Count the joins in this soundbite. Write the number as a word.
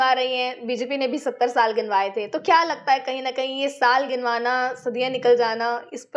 zero